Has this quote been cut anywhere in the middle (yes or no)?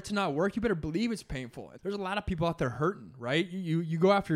yes